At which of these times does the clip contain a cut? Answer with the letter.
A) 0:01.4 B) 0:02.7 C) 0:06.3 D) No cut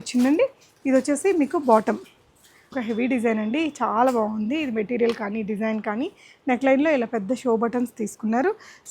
B